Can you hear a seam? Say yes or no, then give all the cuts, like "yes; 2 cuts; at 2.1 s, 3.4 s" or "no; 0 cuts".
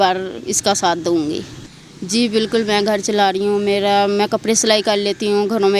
yes; 1 cut; at 1.5 s